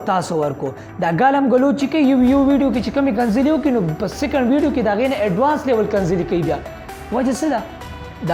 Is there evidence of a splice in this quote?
no; 0 cuts

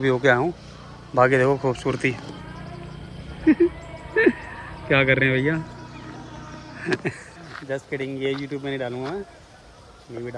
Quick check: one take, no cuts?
yes; 0 cuts

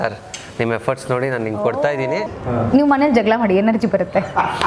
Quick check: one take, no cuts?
no; 1 cut; at 2.4 s

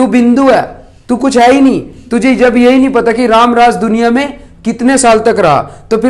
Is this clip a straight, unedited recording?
yes; 0 cuts

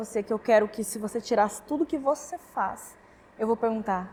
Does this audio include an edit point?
no; 0 cuts

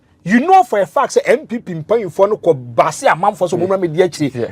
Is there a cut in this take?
no; 0 cuts

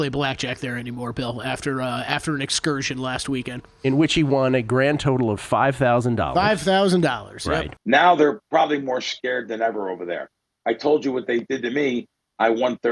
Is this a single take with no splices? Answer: no; 1 cut; at 7.7 s

